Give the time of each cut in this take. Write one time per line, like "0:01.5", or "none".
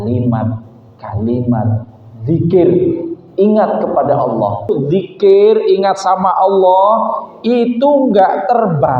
0:04.7